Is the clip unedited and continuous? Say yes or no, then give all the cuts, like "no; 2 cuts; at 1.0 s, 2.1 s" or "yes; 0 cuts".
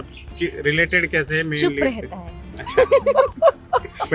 yes; 0 cuts